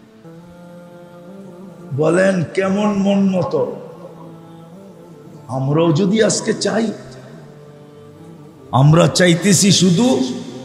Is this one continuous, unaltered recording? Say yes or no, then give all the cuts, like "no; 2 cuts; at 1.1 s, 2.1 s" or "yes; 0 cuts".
yes; 0 cuts